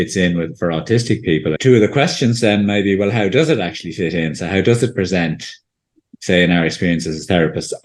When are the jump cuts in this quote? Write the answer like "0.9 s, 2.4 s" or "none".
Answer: 1.6 s